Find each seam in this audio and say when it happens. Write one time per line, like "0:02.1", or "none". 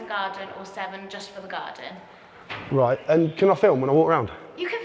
none